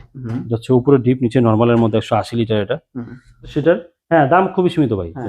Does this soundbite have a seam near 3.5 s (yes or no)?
yes